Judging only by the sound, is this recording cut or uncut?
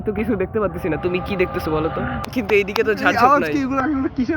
cut